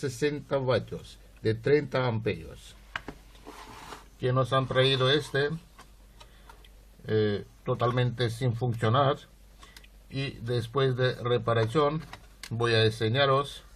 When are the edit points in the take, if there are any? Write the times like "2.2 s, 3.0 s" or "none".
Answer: 12.7 s

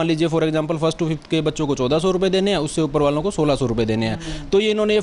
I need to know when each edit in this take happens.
none

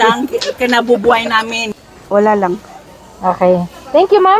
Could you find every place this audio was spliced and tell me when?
1.6 s

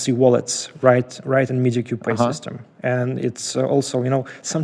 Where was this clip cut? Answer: none

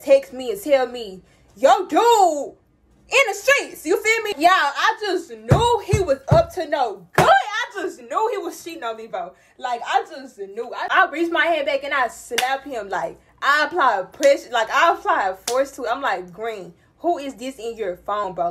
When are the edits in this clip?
4.4 s, 10.9 s

